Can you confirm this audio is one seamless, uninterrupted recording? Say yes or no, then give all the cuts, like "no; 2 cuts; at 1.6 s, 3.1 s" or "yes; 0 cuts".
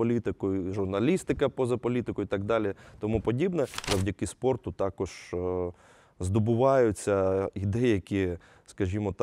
no; 1 cut; at 3.8 s